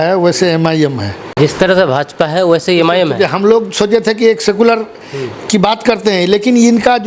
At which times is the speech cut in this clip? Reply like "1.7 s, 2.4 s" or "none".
1.2 s